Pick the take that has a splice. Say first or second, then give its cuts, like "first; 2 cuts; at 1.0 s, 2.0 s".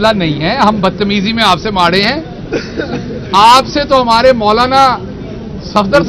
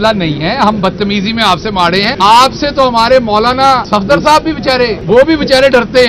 second; 3 cuts; at 2.1 s, 3.8 s, 5.0 s